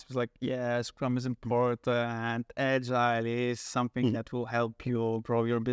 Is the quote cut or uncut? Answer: uncut